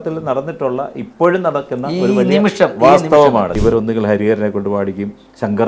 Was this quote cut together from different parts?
yes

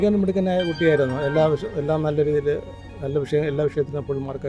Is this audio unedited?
yes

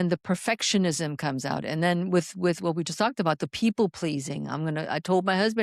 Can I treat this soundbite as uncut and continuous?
yes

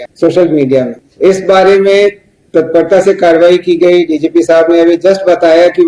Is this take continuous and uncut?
yes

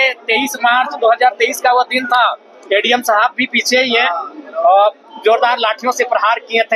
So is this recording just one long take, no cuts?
yes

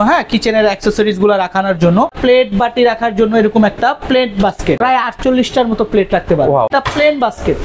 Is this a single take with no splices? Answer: no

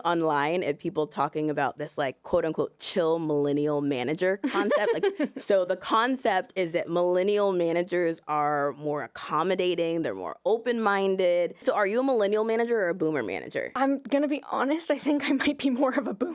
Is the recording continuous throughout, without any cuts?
no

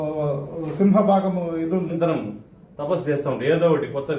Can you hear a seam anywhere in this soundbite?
yes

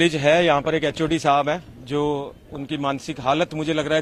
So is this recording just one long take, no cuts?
yes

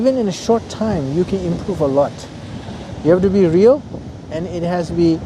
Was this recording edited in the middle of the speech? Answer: yes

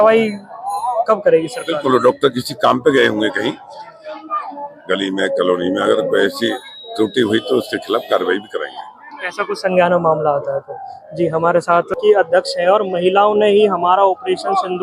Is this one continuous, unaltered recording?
no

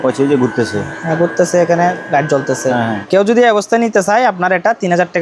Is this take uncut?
no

